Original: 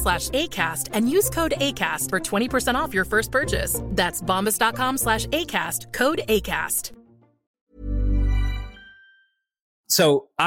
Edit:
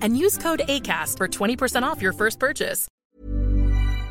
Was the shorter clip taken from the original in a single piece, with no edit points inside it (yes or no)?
no